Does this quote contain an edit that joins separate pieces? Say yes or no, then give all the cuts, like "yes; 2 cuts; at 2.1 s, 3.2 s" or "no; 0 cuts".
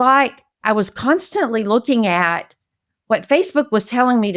no; 0 cuts